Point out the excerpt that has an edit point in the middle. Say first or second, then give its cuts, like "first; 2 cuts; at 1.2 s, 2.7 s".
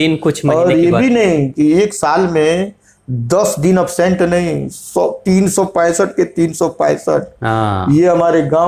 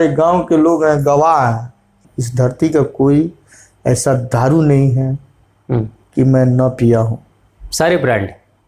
second; 1 cut; at 2.1 s